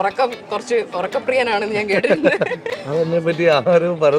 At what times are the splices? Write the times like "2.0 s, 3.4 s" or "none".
2.6 s